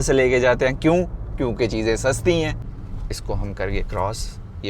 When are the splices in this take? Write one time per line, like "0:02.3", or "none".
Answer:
0:02.6